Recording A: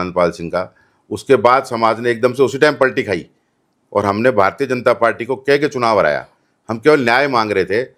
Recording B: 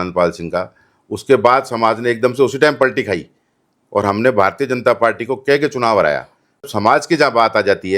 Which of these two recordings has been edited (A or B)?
B